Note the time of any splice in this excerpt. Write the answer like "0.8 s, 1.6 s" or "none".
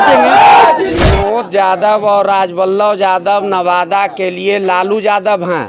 1.1 s

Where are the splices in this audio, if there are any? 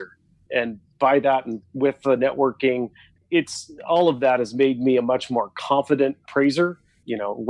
1.6 s, 3.2 s

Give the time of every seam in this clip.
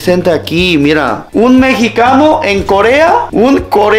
none

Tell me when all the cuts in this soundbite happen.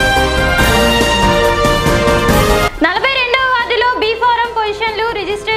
2.6 s

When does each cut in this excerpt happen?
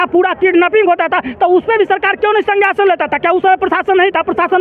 none

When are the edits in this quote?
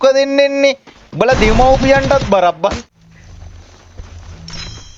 2.8 s

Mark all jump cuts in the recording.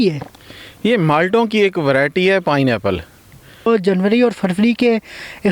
3.7 s

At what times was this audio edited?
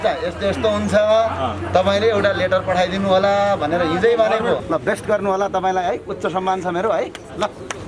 4.6 s

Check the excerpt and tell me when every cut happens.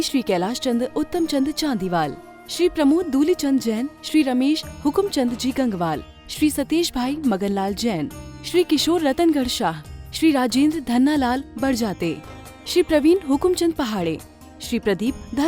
none

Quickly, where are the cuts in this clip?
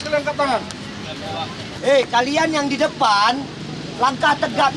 1.7 s

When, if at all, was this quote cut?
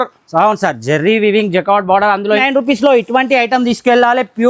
2.4 s

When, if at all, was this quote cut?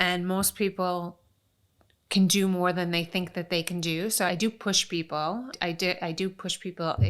4.3 s, 5.5 s

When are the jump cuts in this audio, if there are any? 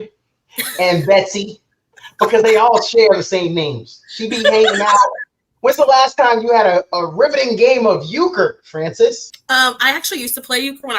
9.3 s

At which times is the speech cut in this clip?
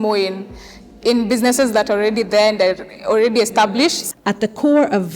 4.0 s

